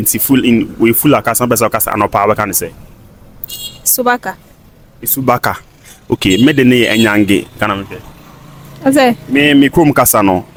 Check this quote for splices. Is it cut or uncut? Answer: uncut